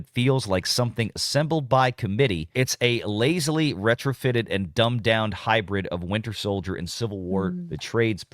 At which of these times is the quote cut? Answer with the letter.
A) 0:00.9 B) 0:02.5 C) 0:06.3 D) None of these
B